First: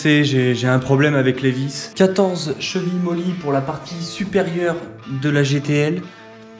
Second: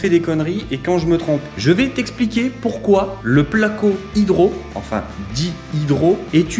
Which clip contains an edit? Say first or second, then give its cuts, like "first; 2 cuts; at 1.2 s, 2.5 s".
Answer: second; 1 cut; at 1.5 s